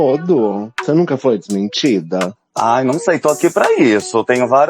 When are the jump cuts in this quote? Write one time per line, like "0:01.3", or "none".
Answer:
0:00.8
0:02.4